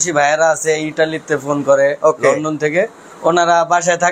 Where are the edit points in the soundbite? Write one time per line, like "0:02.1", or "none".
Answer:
none